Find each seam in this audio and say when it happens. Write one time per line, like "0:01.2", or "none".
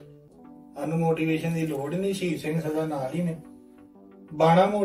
none

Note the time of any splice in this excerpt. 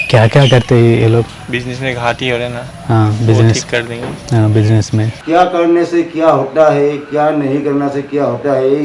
0:01.4
0:05.2

